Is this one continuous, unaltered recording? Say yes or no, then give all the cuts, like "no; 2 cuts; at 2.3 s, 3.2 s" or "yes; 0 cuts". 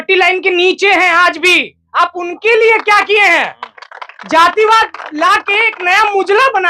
yes; 0 cuts